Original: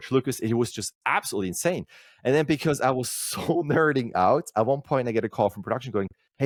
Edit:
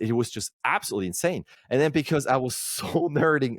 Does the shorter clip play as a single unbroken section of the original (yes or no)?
no